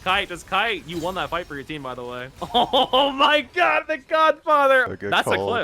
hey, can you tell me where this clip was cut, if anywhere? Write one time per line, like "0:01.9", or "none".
0:02.3
0:04.9